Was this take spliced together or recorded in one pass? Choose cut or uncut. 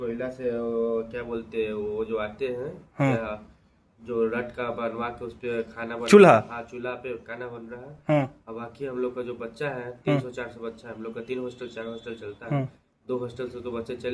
uncut